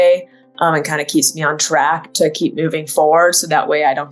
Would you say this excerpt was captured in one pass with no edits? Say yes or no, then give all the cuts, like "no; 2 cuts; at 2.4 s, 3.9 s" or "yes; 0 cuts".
yes; 0 cuts